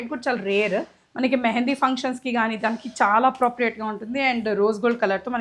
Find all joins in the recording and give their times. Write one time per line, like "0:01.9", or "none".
none